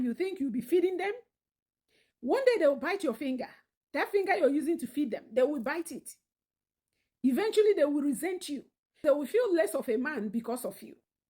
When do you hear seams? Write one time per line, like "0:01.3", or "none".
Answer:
0:09.0